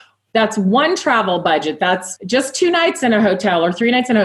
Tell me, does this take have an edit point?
yes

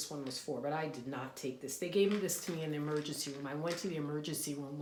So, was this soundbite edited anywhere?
no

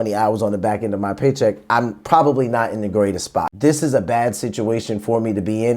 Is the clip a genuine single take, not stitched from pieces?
no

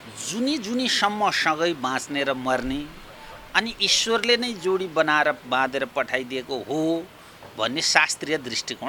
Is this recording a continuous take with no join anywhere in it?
yes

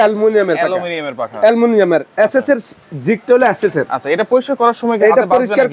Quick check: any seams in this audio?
no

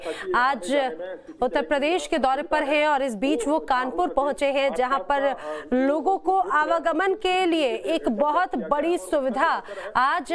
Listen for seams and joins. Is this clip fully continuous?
no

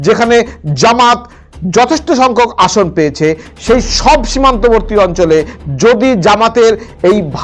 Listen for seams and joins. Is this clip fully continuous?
yes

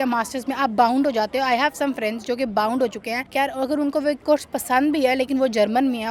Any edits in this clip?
no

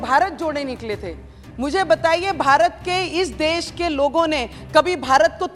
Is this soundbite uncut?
yes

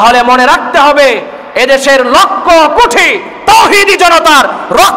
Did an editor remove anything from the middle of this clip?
no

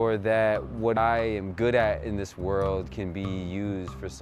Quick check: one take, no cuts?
no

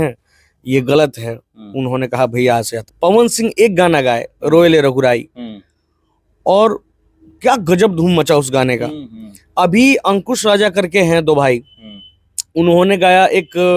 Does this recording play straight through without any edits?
no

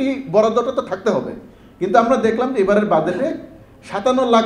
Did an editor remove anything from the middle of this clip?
no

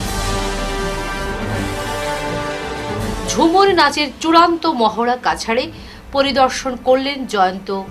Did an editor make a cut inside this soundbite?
no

